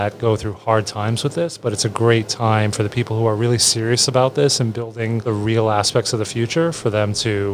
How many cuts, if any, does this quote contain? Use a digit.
1